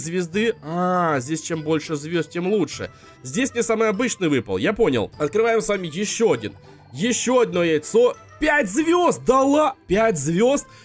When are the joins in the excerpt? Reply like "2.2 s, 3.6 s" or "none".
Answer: 5.1 s, 9.8 s